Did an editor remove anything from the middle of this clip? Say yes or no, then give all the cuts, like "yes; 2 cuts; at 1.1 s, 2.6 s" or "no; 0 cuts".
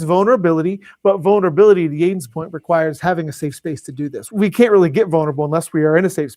yes; 1 cut; at 4.3 s